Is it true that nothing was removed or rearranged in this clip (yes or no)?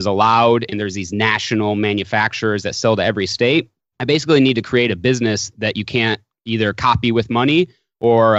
yes